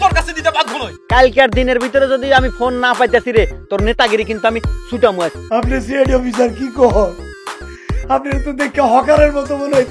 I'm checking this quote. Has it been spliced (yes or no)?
yes